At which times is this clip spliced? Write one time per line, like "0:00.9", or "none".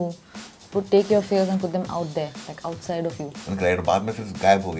0:03.3